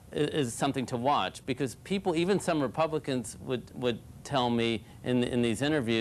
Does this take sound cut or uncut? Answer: uncut